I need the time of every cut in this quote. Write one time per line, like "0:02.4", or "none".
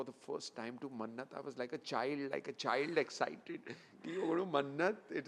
none